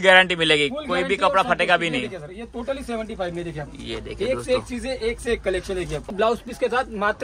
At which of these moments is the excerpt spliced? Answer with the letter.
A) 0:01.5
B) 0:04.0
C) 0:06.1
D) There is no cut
C